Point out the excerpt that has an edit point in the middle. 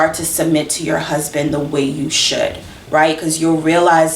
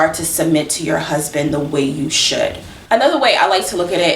second; 1 cut; at 2.9 s

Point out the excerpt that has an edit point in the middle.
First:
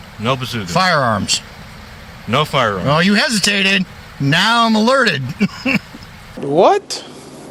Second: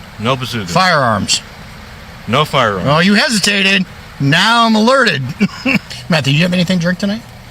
second; 1 cut; at 5.9 s

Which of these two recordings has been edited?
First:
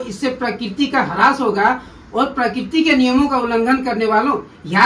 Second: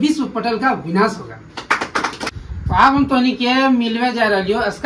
second; 1 cut; at 2.3 s

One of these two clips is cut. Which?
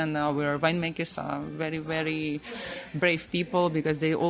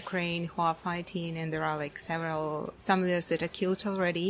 second; 1 cut; at 2.7 s

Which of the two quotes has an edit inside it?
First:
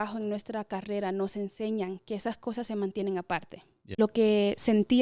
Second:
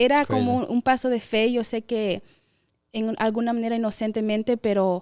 first; 1 cut; at 3.9 s

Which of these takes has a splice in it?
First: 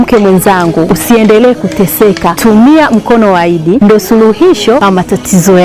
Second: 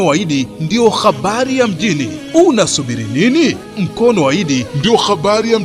first; 4 cuts; at 0.9 s, 2.3 s, 3.8 s, 4.8 s

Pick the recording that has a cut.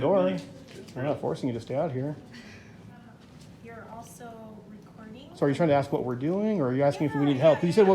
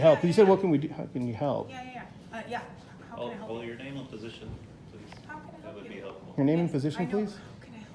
first; 1 cut; at 3.2 s

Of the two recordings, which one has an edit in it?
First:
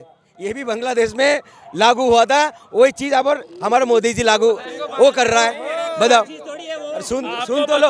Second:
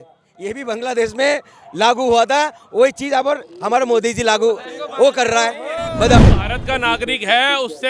second; 1 cut; at 6.2 s

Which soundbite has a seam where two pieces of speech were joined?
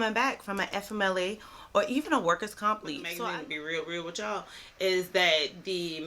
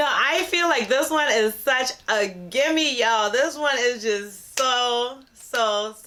first; 1 cut; at 3.0 s

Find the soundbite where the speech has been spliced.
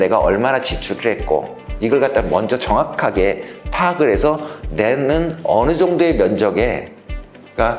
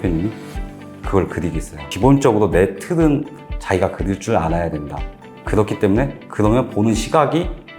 second; 1 cut; at 1.8 s

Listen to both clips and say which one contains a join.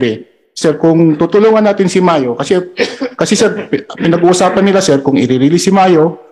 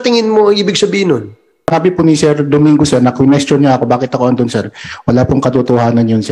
second; 1 cut; at 1.7 s

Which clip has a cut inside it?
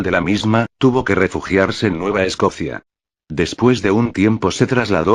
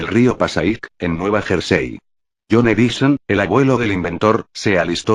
first; 1 cut; at 2.5 s

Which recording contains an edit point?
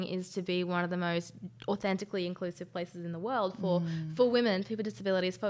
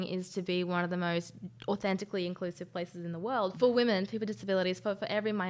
second; 1 cut; at 3.5 s

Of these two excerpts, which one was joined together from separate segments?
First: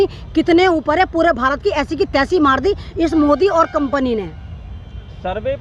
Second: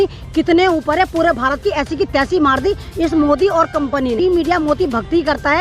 second; 1 cut; at 4.2 s

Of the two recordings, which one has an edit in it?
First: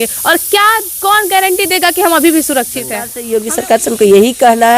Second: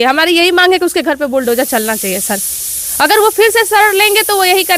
first; 1 cut; at 3.1 s

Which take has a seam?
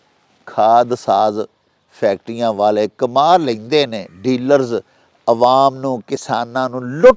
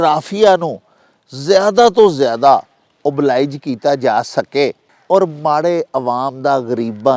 second; 1 cut; at 4.9 s

